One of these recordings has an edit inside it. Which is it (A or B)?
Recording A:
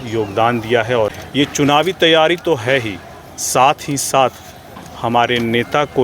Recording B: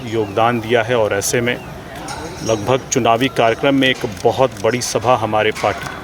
A